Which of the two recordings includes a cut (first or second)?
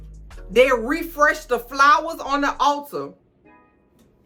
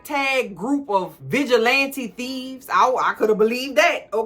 second